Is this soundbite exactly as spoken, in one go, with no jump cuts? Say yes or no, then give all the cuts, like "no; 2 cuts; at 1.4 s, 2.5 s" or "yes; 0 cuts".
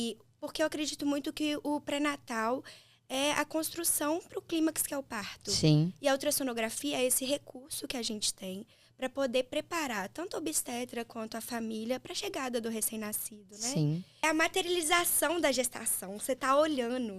no; 1 cut; at 14.2 s